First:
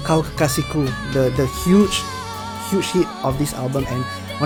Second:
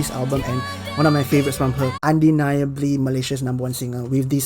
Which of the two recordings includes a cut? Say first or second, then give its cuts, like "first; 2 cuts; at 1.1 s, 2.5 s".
second; 1 cut; at 1.9 s